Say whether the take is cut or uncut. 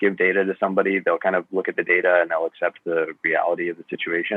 uncut